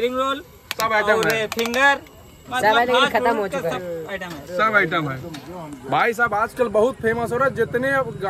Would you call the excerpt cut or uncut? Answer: uncut